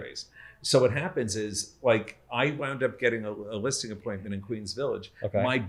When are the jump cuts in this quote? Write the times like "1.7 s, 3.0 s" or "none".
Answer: none